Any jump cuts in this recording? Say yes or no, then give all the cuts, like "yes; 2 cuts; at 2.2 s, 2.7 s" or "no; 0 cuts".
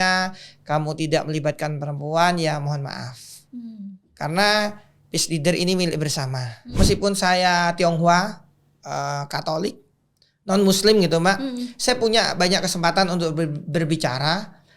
yes; 1 cut; at 6.7 s